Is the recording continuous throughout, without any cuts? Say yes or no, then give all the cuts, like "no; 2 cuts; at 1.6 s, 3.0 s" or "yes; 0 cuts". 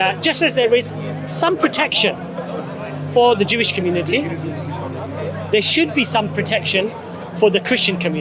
yes; 0 cuts